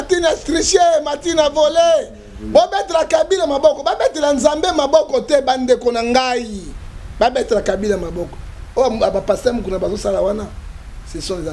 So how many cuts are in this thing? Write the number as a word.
zero